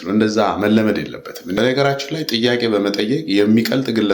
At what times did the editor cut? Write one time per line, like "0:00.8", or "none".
0:01.4